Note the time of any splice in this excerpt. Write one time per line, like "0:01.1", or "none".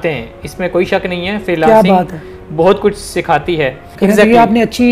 0:03.9